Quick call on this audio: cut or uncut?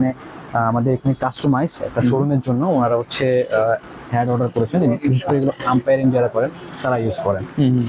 uncut